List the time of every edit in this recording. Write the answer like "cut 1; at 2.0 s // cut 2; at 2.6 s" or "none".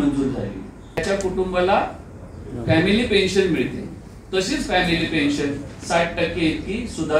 cut 1; at 1.0 s